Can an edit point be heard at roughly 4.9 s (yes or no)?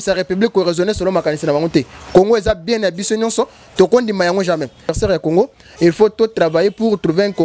yes